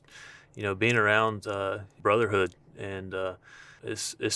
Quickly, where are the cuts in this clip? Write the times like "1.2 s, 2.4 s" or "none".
1.9 s